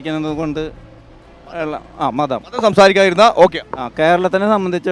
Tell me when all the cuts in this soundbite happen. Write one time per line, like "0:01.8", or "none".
none